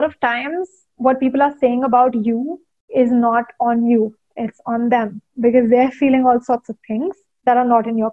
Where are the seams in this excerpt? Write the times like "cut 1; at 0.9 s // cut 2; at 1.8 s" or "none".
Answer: cut 1; at 7.2 s